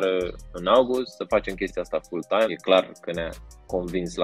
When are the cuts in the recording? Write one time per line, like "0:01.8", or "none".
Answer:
0:02.6